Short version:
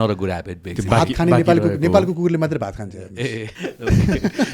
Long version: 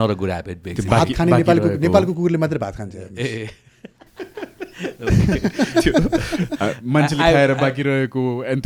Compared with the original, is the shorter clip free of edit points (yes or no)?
no